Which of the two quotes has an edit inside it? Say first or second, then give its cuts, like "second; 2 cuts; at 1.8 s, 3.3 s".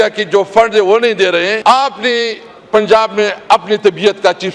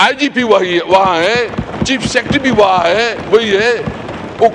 first; 1 cut; at 1.6 s